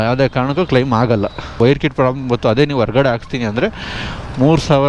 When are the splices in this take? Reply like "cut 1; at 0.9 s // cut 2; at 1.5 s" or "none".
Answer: cut 1; at 1.6 s